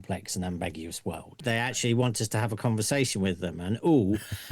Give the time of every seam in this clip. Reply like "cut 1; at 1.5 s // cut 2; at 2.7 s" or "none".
cut 1; at 1.4 s